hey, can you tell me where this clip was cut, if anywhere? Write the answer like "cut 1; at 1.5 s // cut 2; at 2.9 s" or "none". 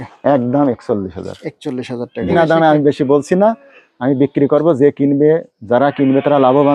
cut 1; at 2.3 s